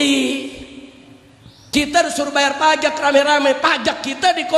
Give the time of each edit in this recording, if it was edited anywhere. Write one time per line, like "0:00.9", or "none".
none